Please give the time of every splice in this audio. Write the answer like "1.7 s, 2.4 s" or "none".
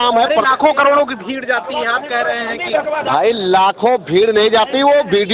none